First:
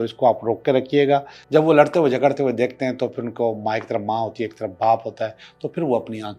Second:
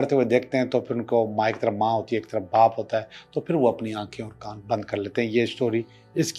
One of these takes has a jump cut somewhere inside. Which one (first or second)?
first